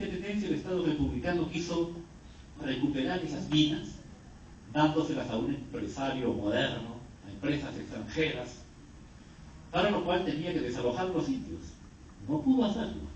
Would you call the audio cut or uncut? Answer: cut